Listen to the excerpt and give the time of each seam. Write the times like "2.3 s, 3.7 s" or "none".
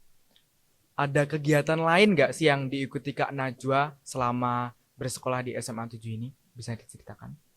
none